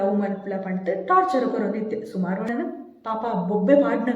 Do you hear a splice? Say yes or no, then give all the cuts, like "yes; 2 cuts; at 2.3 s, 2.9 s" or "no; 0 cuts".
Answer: yes; 1 cut; at 2.5 s